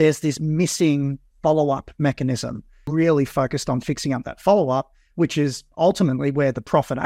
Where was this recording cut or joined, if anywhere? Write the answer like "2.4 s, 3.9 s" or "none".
2.8 s